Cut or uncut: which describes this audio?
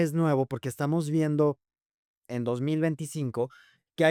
uncut